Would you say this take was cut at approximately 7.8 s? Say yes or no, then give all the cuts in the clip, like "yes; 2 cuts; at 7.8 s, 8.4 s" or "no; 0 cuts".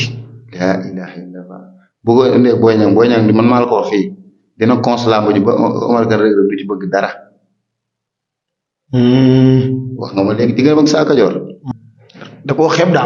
no; 1 cut; at 11.5 s